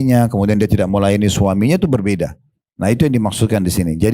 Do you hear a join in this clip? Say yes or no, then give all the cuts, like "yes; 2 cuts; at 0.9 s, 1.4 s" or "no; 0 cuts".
no; 0 cuts